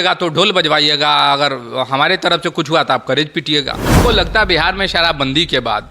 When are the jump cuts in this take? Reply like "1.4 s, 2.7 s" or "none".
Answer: 4.0 s